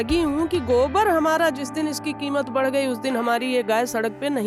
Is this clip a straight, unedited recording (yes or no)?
yes